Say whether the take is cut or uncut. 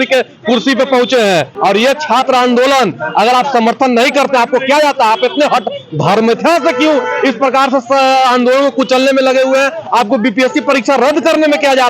cut